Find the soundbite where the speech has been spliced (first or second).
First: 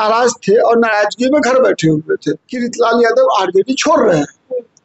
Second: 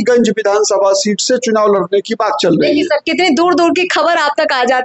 first